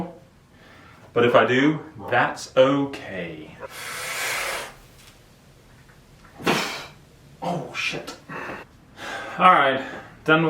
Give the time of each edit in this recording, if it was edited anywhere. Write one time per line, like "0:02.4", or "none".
0:03.7
0:08.7